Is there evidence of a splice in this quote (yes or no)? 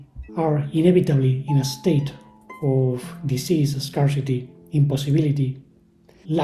no